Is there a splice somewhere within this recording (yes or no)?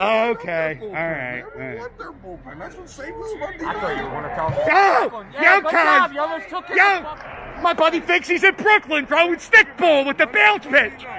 yes